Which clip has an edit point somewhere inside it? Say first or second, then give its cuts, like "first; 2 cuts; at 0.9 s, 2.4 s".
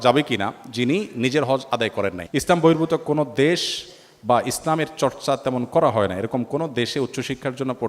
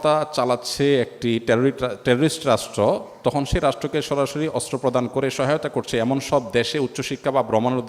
first; 1 cut; at 2.2 s